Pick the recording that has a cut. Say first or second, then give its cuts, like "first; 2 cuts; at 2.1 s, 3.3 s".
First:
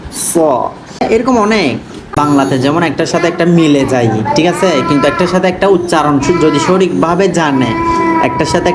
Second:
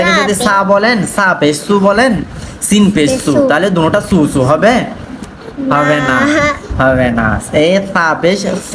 first; 2 cuts; at 1.0 s, 2.2 s